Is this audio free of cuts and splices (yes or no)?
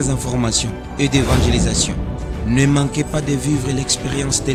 yes